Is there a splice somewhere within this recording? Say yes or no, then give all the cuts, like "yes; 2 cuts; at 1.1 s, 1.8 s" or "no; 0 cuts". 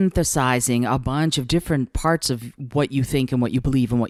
no; 0 cuts